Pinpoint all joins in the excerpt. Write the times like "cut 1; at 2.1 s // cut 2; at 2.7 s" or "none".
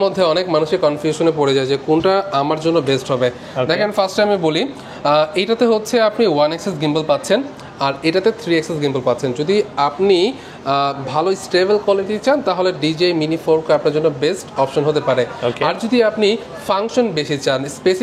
none

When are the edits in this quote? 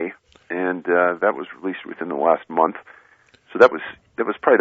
cut 1; at 3.6 s

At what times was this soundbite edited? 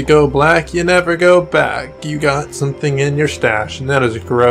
none

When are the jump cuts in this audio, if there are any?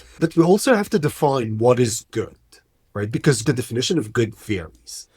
cut 1; at 3.4 s

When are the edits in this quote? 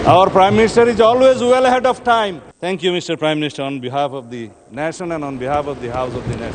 cut 1; at 2.5 s

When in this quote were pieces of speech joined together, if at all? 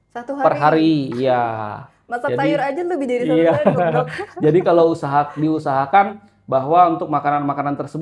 none

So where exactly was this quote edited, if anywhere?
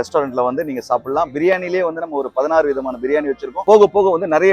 cut 1; at 3.6 s

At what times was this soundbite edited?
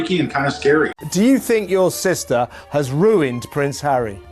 cut 1; at 1.0 s

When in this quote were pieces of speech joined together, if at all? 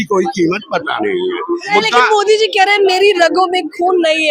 cut 1; at 1.7 s

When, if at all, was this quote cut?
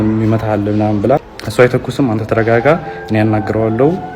cut 1; at 1.4 s

